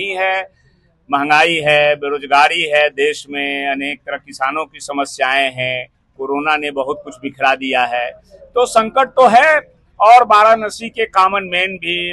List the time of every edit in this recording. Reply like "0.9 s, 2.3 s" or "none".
none